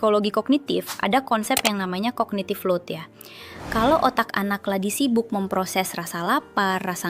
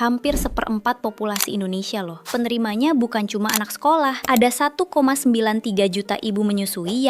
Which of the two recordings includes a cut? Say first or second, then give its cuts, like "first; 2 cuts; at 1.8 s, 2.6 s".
second; 2 cuts; at 2.2 s, 4.2 s